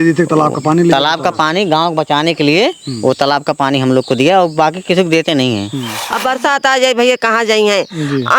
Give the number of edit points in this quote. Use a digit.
1